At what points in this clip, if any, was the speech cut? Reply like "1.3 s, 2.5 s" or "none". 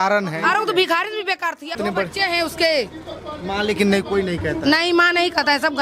1.8 s